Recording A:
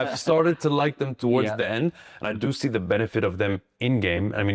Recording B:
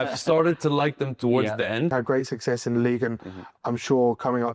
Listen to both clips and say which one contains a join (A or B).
B